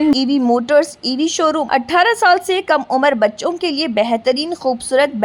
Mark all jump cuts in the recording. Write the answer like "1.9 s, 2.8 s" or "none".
1.6 s